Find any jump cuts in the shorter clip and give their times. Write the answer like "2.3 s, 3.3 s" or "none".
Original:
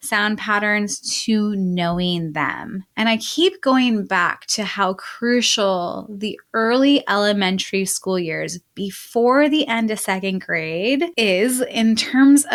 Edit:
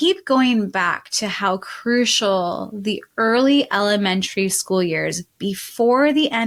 none

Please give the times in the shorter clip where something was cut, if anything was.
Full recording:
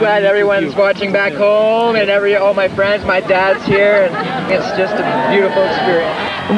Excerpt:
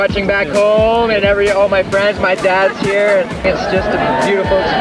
3.3 s

